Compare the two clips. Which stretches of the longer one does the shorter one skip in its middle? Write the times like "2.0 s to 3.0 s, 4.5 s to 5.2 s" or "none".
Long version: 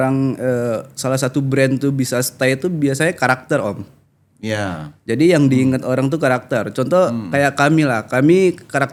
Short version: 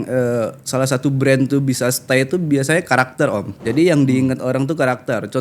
3.8 s to 5.0 s